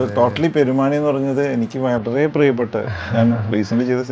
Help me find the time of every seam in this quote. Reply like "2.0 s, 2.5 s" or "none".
none

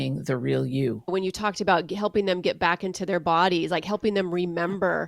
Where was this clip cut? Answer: 1.1 s

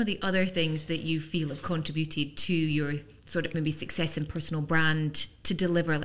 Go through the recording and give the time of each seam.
none

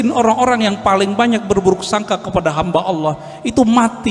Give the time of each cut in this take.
none

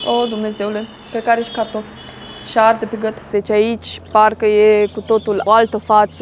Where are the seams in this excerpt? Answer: 3.3 s, 5.4 s

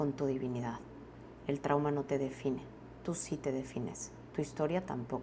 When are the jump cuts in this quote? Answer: none

